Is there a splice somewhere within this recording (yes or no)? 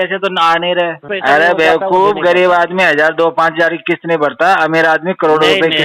yes